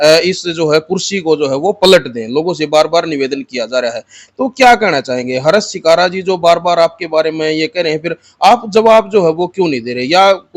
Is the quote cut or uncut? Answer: uncut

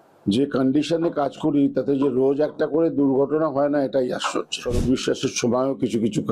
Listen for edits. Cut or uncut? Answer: cut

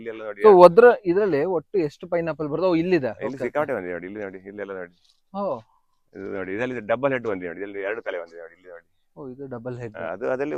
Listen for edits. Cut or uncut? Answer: uncut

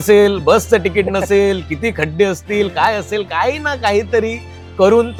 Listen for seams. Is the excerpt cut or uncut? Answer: uncut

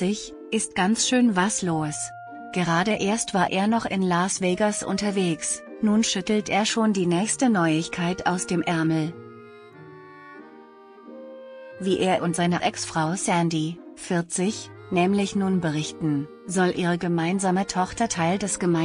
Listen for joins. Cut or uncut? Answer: cut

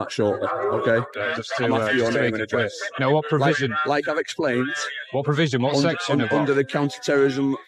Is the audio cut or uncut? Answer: cut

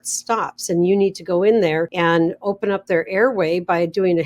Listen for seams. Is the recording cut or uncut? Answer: cut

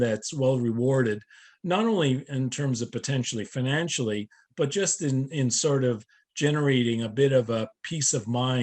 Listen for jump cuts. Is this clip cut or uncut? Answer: uncut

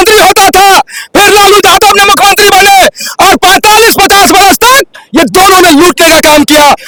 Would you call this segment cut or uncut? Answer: uncut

